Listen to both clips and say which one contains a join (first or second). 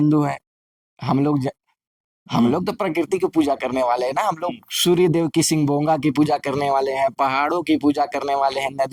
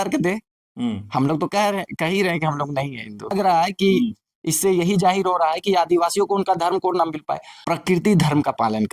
second